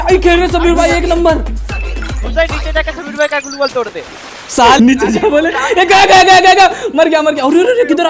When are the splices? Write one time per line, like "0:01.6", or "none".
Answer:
0:04.8